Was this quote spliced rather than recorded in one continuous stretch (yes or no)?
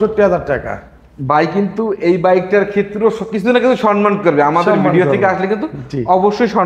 no